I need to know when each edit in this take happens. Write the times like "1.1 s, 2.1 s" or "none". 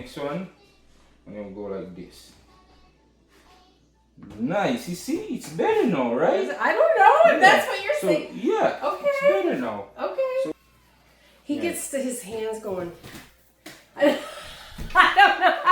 10.6 s